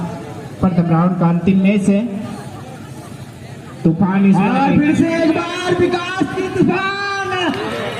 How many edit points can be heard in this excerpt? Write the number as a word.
zero